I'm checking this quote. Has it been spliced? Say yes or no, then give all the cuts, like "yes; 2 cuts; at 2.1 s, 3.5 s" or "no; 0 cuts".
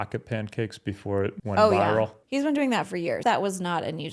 yes; 3 cuts; at 1.4 s, 2.2 s, 3.2 s